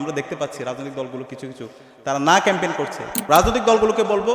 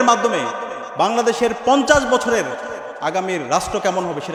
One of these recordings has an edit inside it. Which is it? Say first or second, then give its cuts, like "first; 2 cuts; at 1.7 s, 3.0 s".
first; 1 cut; at 3.2 s